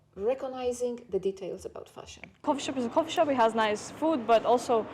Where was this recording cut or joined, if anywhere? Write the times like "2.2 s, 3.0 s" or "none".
2.4 s